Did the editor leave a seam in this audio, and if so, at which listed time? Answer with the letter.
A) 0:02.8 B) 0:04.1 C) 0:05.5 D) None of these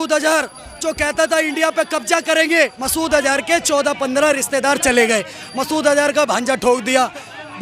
A